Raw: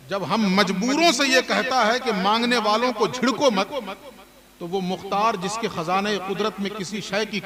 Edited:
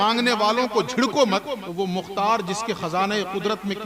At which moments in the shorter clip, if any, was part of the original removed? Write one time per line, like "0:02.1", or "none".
0:01.7